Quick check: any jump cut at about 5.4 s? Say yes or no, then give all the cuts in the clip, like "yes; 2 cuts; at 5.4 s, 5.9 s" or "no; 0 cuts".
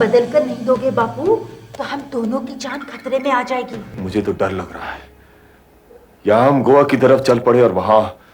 no; 1 cut; at 4.1 s